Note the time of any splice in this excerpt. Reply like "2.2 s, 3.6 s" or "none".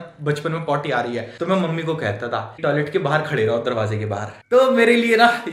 1.3 s, 2.5 s, 4.3 s